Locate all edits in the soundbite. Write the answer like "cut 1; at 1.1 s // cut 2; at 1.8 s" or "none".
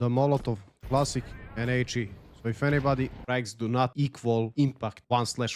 cut 1; at 3.2 s